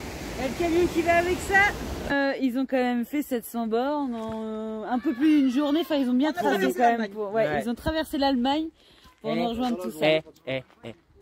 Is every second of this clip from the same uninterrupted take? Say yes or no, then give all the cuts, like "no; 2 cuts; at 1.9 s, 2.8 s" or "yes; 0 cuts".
no; 1 cut; at 2.1 s